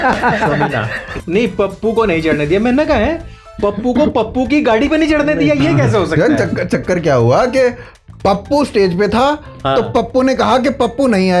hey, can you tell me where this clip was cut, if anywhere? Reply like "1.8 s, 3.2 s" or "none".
1.1 s

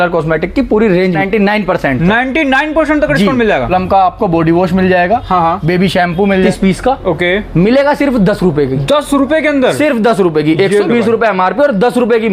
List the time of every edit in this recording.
1.2 s, 3.7 s, 6.5 s

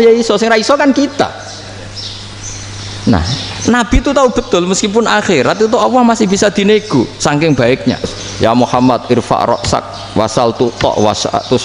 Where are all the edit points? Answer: 8.2 s

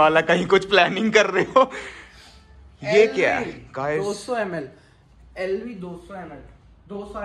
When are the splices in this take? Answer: none

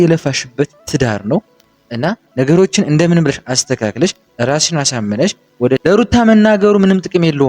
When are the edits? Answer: 5.8 s

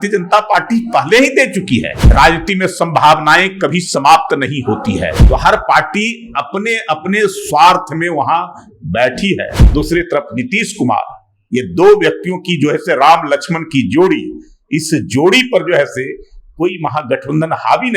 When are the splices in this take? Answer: 2.0 s, 5.2 s, 9.6 s

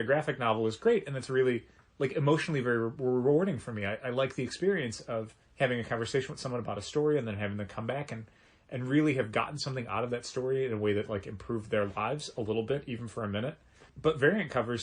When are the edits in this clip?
5.4 s, 13.9 s

